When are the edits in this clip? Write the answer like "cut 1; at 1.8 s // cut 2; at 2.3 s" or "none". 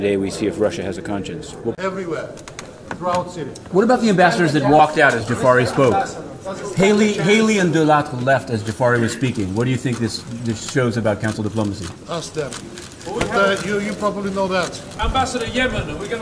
cut 1; at 1.7 s